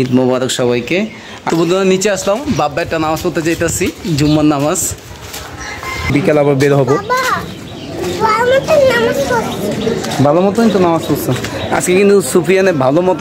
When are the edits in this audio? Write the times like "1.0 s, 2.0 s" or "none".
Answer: 1.3 s, 6.1 s